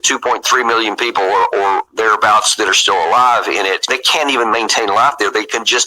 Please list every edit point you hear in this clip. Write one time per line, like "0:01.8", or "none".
0:04.0